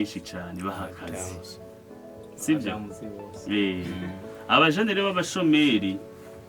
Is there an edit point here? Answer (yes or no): no